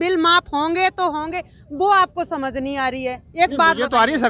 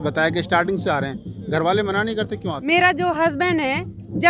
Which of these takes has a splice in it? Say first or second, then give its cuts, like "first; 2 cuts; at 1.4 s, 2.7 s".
second; 1 cut; at 2.5 s